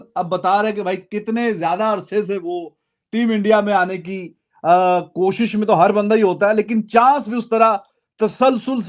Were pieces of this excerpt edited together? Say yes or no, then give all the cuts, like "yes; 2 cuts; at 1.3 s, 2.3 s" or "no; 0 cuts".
no; 0 cuts